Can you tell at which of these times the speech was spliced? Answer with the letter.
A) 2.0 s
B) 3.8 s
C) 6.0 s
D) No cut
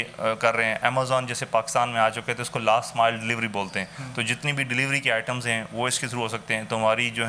D